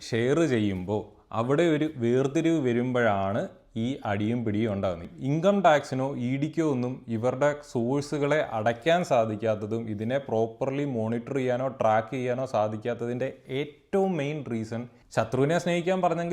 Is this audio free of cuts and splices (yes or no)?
no